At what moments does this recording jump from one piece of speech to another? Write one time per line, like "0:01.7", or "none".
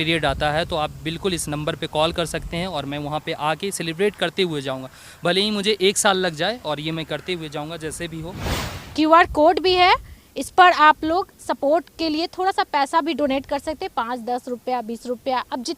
0:08.6

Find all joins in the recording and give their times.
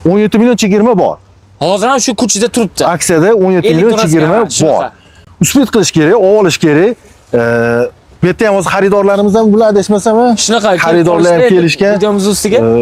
none

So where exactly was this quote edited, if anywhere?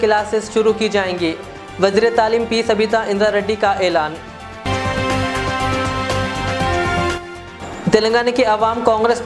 none

